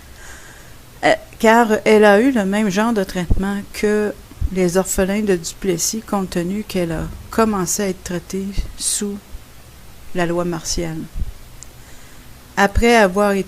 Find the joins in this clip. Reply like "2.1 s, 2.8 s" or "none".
7.1 s

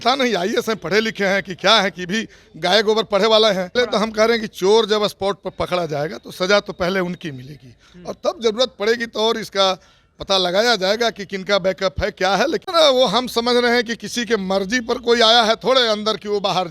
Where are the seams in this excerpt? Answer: 3.7 s, 12.7 s

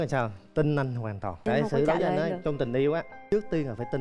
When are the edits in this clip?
1.4 s

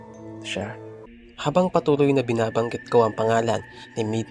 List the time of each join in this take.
1.1 s

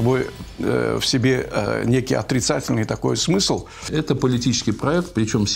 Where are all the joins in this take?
3.9 s

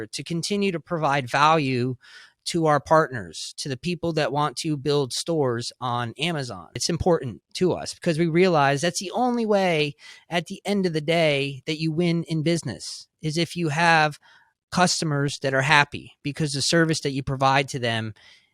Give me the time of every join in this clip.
6.8 s

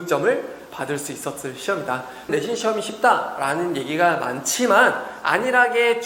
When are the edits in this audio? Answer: 2.3 s

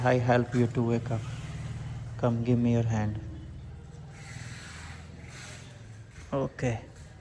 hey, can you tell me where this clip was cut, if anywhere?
none

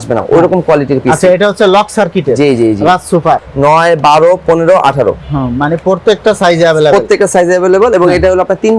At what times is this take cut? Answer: 3.4 s

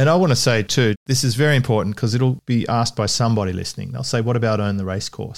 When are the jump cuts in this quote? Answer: 1.0 s, 2.4 s

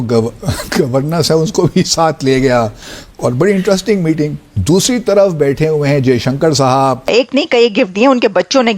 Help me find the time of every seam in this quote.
7.1 s

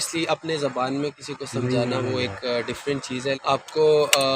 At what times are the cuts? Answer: 3.4 s

